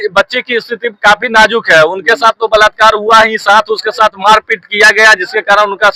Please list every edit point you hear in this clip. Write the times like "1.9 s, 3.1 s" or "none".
none